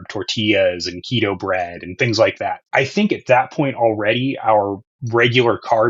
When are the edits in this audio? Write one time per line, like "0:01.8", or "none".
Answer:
0:02.6